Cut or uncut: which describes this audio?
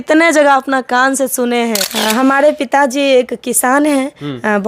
cut